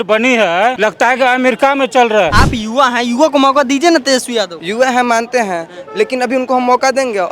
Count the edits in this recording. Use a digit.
3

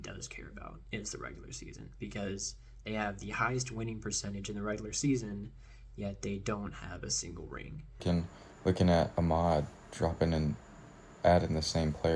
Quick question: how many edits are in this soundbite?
1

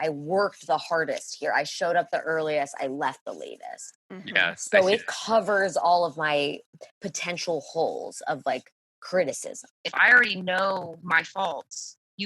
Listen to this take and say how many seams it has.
1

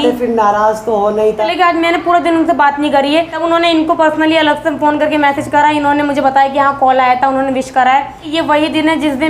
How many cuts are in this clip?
3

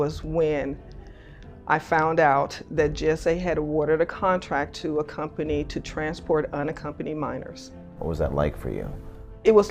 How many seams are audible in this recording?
1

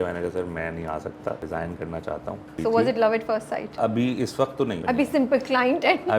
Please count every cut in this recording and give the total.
3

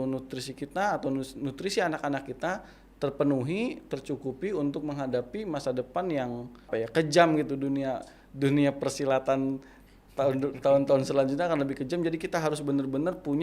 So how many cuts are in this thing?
1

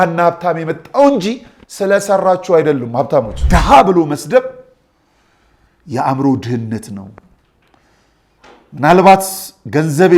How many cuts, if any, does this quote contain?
1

